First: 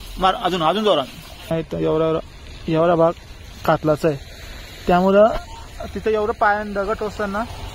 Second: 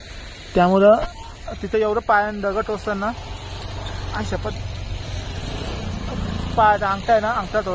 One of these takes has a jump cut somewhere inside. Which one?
first; 1 cut; at 1.5 s

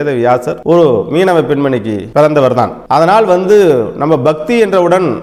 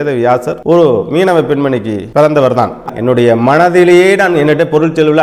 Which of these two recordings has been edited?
second; 1 cut; at 2.9 s

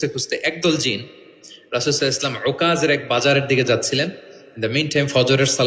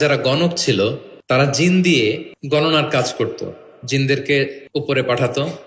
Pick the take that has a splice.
second; 3 cuts; at 1.1 s, 2.3 s, 4.6 s

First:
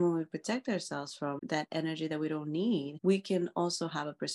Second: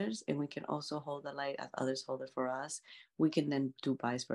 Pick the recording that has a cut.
first; 2 cuts; at 1.4 s, 2.9 s

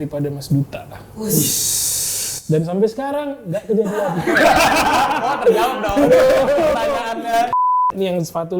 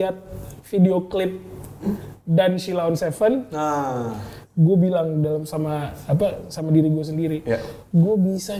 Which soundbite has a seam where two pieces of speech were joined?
first; 1 cut; at 7.5 s

